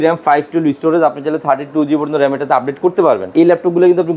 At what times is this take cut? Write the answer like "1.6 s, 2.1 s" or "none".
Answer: 3.3 s